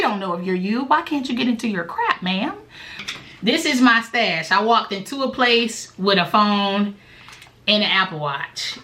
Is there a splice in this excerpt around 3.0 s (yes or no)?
yes